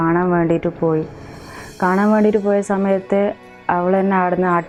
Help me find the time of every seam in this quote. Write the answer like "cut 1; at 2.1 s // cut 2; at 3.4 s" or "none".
none